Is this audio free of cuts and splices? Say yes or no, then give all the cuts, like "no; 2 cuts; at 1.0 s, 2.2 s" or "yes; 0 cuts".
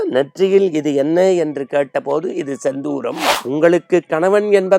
no; 1 cut; at 3.3 s